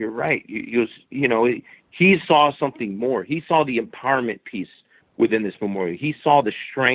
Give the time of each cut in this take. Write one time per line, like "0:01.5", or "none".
none